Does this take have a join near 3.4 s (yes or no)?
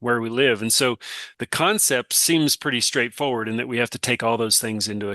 no